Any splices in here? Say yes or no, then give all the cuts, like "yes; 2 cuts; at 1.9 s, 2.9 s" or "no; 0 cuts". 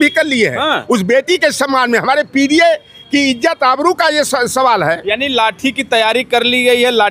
no; 0 cuts